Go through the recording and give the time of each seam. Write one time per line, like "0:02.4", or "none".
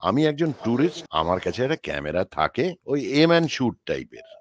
0:01.0
0:02.8